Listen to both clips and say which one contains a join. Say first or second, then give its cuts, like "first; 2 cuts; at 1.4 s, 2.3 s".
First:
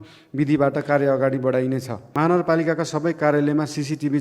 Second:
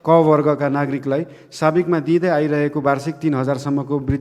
first; 1 cut; at 2.0 s